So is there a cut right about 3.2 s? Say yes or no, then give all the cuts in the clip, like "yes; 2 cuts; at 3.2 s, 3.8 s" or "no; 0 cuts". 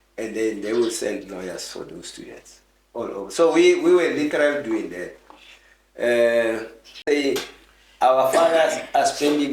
no; 1 cut; at 7.1 s